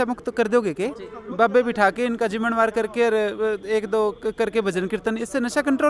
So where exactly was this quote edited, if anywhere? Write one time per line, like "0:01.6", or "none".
none